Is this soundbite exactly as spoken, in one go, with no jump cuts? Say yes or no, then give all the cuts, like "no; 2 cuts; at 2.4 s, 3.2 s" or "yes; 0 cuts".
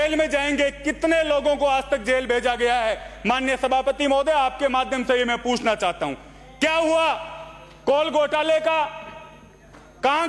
yes; 0 cuts